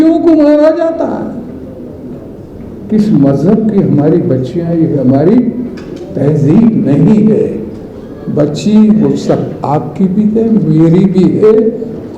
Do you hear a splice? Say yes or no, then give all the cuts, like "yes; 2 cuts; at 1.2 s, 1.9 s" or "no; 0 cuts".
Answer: no; 0 cuts